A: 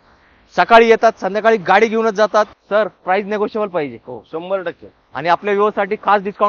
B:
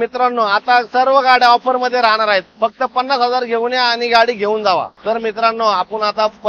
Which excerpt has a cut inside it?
B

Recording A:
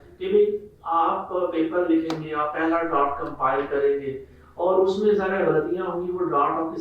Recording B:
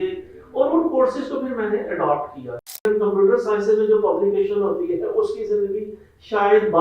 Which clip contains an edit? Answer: B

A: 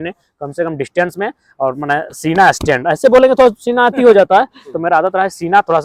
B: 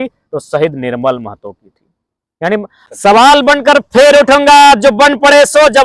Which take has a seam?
B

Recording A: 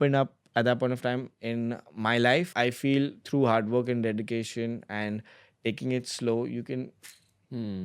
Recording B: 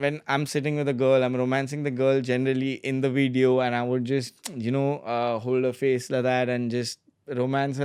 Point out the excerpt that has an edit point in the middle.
A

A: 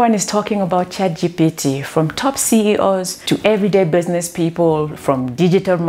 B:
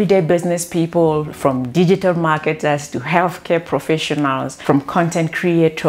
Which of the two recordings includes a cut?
B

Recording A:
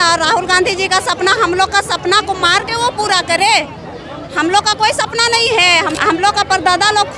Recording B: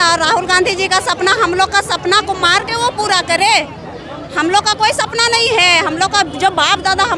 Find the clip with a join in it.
A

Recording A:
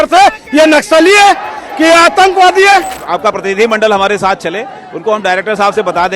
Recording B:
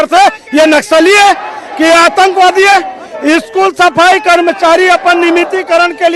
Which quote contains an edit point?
A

